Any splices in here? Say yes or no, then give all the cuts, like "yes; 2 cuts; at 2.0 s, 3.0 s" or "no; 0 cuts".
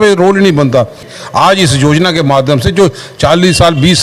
yes; 1 cut; at 1.1 s